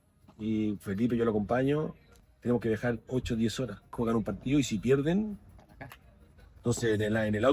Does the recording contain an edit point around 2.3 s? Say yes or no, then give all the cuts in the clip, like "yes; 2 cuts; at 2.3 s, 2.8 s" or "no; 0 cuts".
yes; 3 cuts; at 2.3 s, 4.0 s, 6.4 s